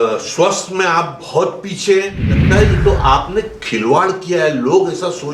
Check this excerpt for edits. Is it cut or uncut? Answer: cut